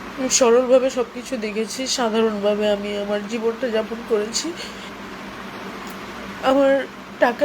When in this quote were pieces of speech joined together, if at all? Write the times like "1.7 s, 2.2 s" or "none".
4.9 s